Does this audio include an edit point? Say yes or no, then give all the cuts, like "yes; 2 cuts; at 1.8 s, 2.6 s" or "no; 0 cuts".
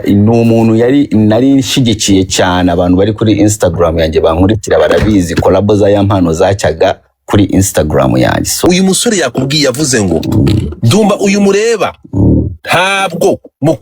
yes; 1 cut; at 8.6 s